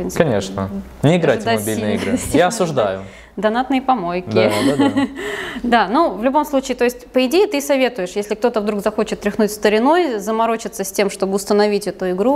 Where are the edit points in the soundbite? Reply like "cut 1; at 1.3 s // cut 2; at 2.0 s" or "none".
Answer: none